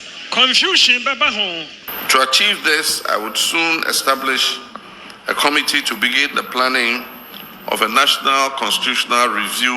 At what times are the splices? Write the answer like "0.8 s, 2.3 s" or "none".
1.9 s